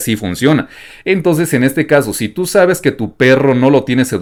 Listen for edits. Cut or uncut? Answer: uncut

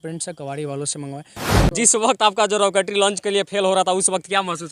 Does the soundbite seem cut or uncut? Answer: cut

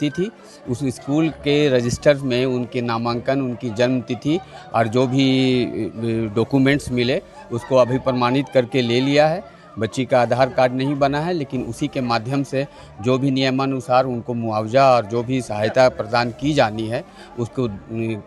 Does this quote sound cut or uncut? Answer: uncut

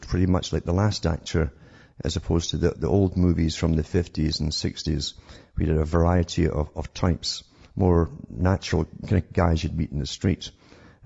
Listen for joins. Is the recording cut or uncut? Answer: cut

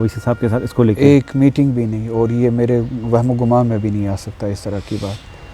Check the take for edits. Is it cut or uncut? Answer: uncut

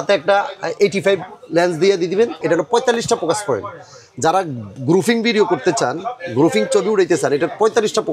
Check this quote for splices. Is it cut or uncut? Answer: cut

